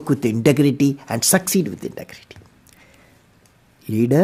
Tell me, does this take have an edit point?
no; 0 cuts

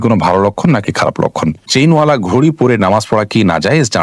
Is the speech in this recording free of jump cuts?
no; 1 cut; at 1.7 s

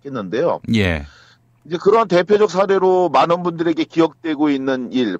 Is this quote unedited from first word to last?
no; 1 cut; at 3.6 s

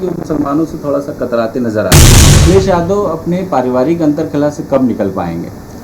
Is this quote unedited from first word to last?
no; 1 cut; at 2.3 s

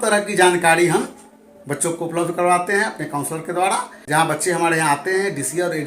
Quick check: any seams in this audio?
yes; 1 cut; at 4.0 s

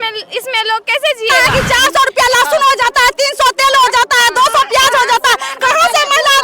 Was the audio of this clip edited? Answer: yes; 1 cut; at 1.5 s

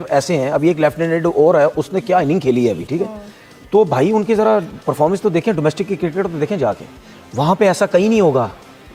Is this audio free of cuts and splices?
yes; 0 cuts

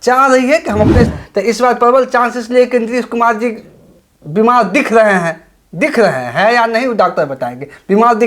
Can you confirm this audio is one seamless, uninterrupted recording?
no; 1 cut; at 1.1 s

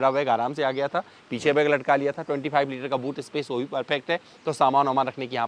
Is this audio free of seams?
yes; 0 cuts

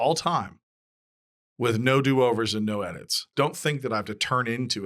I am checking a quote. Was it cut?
yes; 1 cut; at 3.3 s

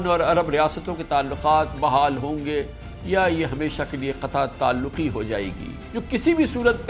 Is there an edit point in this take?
yes; 1 cut; at 1.7 s

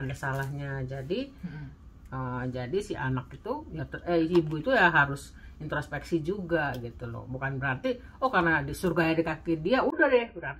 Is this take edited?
no; 0 cuts

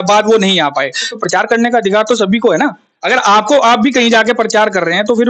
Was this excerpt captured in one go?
no; 1 cut; at 1.2 s

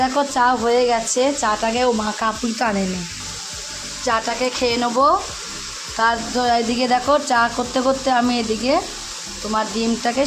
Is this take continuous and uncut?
yes; 0 cuts

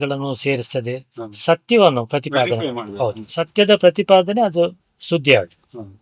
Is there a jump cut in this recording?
no; 0 cuts

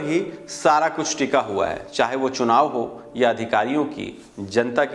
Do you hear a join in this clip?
no; 0 cuts

